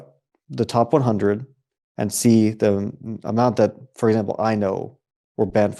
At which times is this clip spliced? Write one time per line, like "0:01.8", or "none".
none